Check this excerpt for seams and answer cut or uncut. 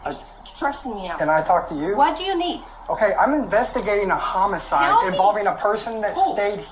cut